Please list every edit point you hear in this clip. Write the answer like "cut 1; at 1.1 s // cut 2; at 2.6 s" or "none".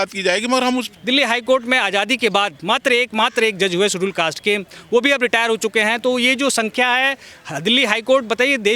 cut 1; at 0.9 s